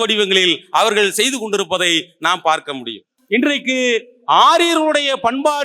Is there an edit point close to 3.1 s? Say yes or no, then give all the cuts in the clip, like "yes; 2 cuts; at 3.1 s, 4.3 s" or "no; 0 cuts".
yes; 1 cut; at 3.1 s